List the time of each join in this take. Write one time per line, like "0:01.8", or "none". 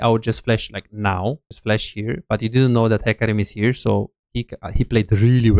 0:01.5